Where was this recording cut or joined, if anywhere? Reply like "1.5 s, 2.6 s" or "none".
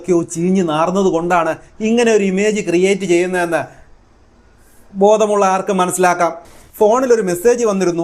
6.5 s